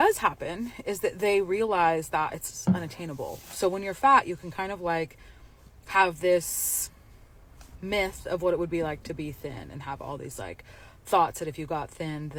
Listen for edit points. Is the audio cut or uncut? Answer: uncut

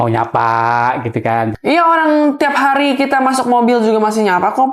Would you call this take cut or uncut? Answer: uncut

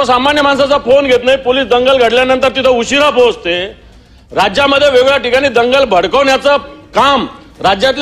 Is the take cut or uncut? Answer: uncut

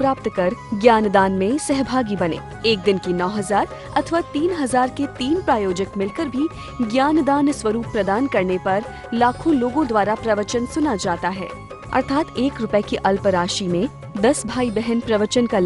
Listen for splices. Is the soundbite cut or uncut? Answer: uncut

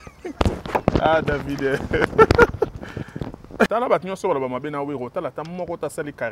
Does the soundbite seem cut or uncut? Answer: cut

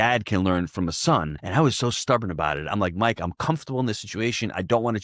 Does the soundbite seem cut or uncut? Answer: cut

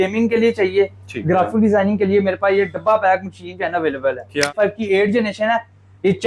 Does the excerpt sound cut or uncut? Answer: cut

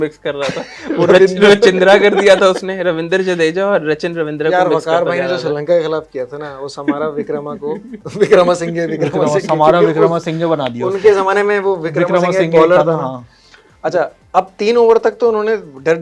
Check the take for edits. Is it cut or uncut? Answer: uncut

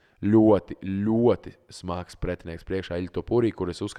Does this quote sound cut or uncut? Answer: uncut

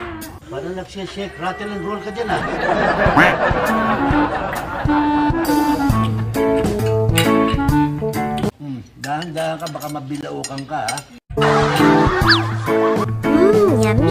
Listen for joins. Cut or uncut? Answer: cut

